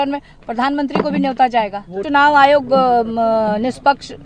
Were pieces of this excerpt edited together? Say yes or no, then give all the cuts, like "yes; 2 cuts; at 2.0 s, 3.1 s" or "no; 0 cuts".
yes; 1 cut; at 1.9 s